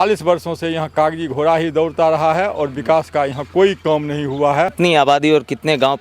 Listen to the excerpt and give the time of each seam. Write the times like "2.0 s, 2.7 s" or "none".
4.7 s